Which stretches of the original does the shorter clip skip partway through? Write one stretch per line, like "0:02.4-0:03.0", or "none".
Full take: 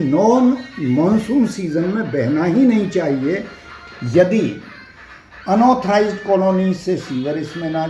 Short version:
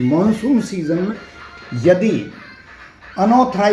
0:02.0-0:03.5